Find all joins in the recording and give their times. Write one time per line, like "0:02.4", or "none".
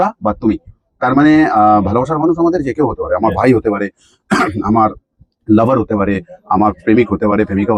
none